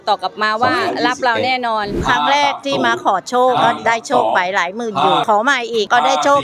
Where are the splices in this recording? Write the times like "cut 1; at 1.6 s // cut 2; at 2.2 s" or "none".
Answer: cut 1; at 2.0 s // cut 2; at 5.2 s